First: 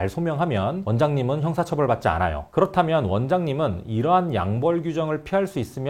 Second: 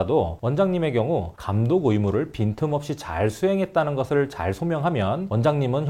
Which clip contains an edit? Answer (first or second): first